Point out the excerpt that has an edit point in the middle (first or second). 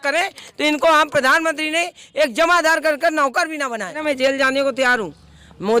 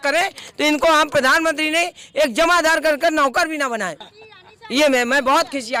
first